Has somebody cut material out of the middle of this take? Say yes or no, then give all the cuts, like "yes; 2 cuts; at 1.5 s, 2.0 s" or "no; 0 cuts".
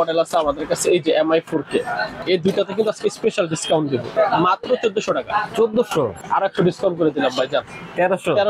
yes; 3 cuts; at 2.2 s, 4.1 s, 6.2 s